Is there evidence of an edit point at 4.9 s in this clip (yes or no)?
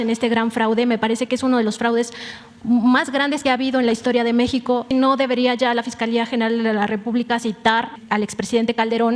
yes